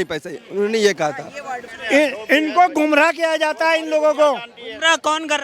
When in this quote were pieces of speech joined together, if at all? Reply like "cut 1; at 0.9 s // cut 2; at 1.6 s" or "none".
cut 1; at 1.3 s